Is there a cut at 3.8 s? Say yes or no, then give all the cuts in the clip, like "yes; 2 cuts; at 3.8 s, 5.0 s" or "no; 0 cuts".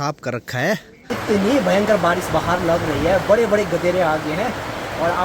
no; 1 cut; at 1.1 s